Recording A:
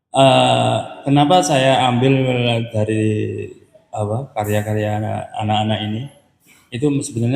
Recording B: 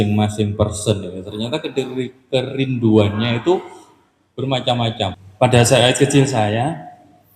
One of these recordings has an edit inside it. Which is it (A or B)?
B